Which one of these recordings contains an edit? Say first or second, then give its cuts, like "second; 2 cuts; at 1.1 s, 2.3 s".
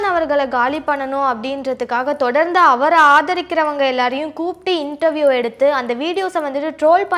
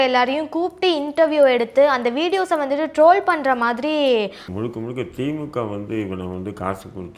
second; 1 cut; at 4.4 s